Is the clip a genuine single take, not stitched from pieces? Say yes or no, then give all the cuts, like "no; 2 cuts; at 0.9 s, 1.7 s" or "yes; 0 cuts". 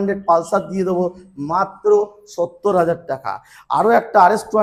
yes; 0 cuts